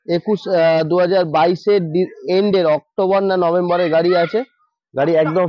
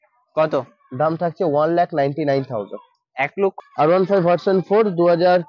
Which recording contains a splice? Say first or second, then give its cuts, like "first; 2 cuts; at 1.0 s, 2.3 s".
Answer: second; 1 cut; at 3.6 s